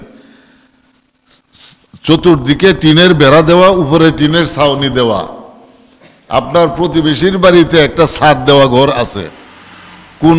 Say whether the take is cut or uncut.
uncut